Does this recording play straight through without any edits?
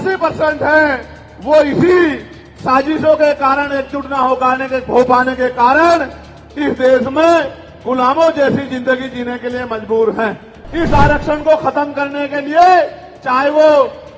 no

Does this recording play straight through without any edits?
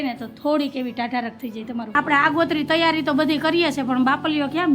no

